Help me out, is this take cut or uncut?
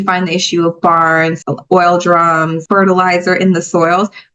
cut